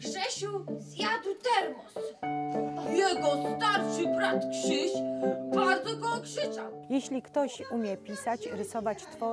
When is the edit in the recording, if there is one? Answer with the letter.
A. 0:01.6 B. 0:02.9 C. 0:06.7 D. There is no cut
C